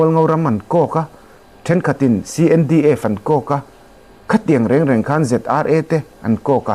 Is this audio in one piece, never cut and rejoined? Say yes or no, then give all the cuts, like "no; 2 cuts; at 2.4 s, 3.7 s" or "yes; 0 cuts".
yes; 0 cuts